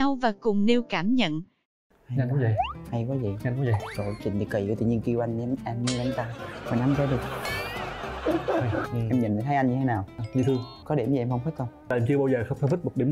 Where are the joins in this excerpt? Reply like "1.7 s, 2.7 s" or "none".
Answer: 8.9 s, 10.8 s, 11.9 s